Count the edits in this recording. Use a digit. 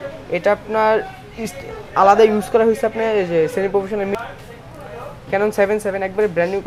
1